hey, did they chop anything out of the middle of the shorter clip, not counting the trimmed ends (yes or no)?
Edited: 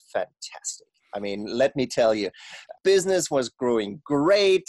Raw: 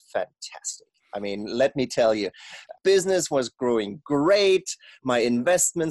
no